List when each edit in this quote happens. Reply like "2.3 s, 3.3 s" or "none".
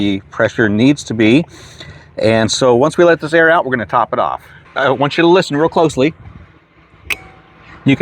4.7 s